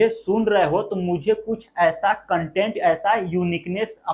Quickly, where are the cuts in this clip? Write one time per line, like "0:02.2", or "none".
none